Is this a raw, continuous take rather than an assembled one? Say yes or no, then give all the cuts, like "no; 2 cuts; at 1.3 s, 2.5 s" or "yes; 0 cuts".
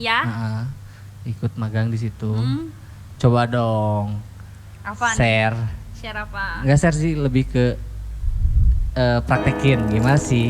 yes; 0 cuts